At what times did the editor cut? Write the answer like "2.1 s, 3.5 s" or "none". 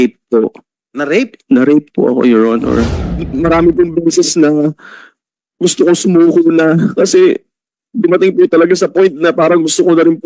3.2 s